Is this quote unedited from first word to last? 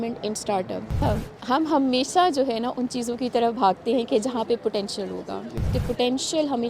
no; 2 cuts; at 1.0 s, 5.6 s

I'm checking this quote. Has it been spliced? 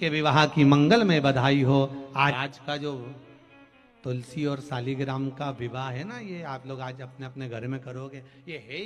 yes; 1 cut; at 2.3 s

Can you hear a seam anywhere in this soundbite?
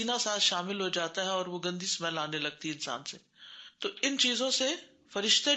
no; 0 cuts

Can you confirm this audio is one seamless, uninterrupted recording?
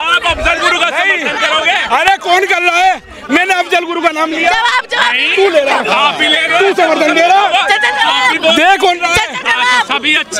yes; 0 cuts

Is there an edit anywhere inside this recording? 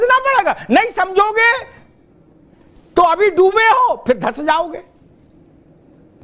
no; 0 cuts

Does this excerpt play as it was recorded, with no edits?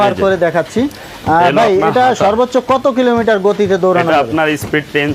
yes; 0 cuts

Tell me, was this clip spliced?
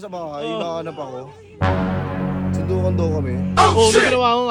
no; 0 cuts

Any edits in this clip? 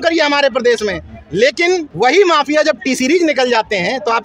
yes; 1 cut; at 1.9 s

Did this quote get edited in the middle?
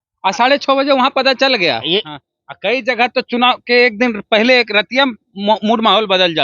yes; 1 cut; at 2.1 s

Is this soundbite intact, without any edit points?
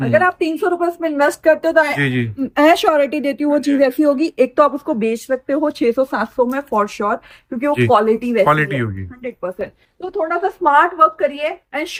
yes; 0 cuts

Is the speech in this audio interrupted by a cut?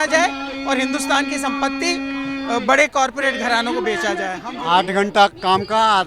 yes; 1 cut; at 4.4 s

